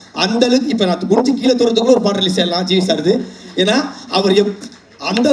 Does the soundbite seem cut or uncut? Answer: uncut